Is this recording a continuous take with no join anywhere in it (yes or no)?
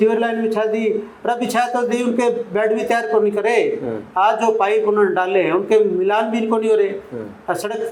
yes